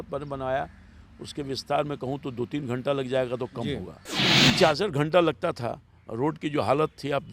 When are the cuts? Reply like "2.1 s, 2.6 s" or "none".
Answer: 4.3 s